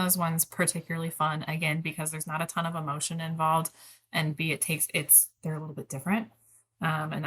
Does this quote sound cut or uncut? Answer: uncut